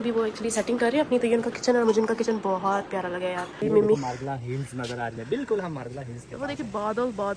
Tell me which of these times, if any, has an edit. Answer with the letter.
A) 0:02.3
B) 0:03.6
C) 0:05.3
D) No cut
B